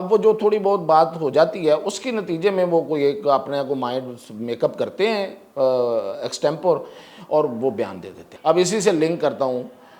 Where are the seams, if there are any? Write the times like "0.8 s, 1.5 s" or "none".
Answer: 8.2 s